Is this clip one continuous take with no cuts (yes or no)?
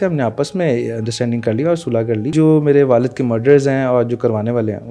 no